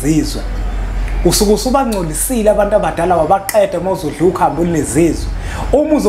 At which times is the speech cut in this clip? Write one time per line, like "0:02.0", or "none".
none